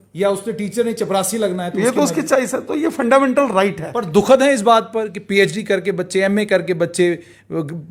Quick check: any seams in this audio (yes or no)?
no